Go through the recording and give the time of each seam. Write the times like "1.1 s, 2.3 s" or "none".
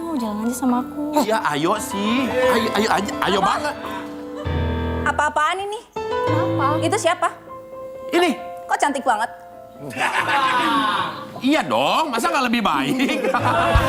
none